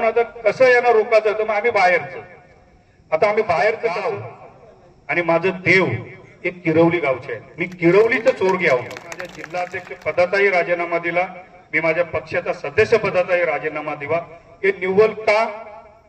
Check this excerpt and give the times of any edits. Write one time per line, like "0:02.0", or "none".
0:04.1
0:09.4